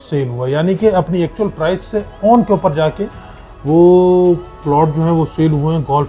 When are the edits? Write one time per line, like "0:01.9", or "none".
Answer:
none